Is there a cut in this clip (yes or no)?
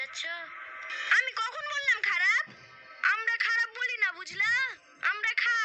yes